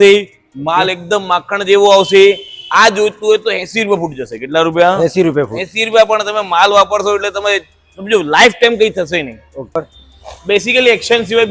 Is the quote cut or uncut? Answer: cut